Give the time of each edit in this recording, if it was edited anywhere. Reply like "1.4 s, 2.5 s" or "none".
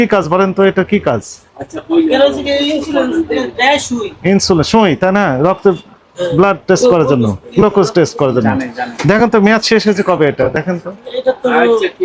none